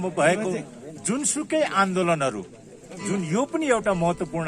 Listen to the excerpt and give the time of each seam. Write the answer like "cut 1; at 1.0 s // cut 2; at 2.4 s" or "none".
none